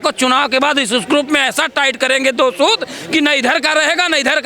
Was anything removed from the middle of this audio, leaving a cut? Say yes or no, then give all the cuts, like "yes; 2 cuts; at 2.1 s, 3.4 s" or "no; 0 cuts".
no; 0 cuts